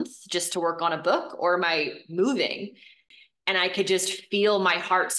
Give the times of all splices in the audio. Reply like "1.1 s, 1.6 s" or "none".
3.1 s